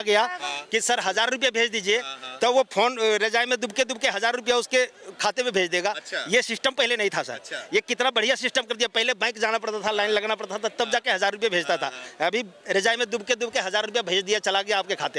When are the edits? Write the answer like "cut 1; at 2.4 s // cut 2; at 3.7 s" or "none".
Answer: none